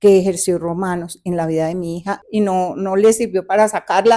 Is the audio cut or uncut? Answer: cut